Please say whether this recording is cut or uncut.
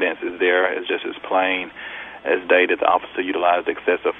uncut